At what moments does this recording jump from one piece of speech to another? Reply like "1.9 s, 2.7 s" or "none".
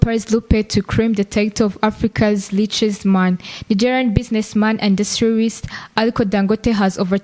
none